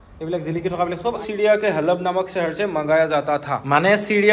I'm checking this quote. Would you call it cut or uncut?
cut